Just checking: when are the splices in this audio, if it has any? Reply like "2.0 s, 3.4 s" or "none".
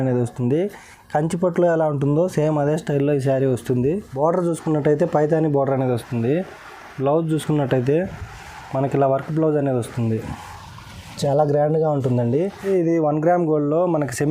4.1 s, 12.6 s